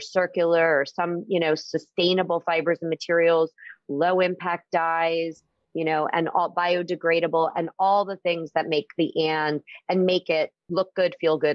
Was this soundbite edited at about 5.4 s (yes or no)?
no